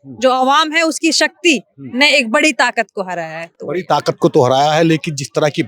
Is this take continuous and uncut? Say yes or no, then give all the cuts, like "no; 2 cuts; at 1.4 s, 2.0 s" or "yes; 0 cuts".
yes; 0 cuts